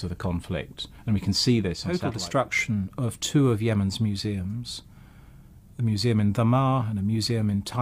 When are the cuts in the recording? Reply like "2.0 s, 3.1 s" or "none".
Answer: 2.1 s

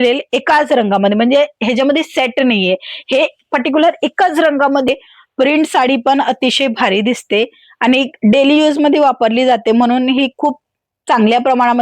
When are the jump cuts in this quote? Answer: 4.9 s

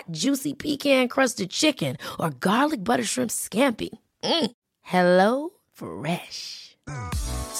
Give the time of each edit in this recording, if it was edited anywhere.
none

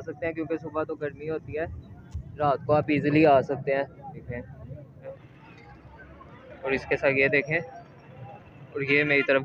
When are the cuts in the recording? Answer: 4.3 s, 5.2 s

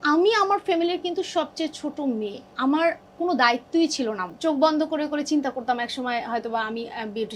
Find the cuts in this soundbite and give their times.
2.4 s, 4.3 s

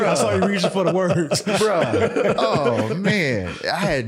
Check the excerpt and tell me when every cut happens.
none

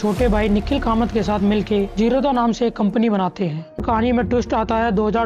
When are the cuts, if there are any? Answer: 3.8 s

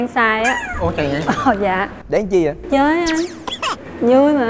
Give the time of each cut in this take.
none

